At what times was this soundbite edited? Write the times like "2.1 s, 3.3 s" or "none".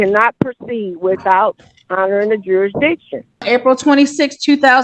3.4 s